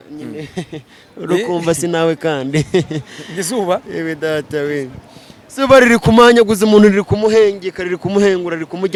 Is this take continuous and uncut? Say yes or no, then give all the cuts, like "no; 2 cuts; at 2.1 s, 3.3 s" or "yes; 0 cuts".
yes; 0 cuts